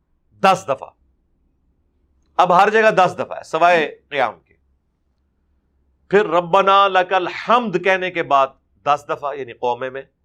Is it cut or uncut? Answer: uncut